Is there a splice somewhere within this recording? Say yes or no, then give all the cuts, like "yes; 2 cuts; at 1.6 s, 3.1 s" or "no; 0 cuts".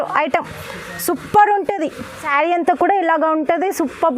yes; 1 cut; at 2.2 s